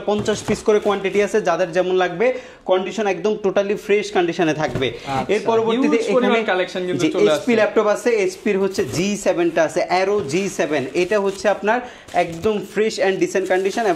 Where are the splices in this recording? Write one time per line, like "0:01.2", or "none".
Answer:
none